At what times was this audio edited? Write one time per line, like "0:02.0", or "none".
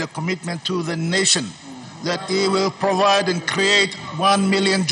none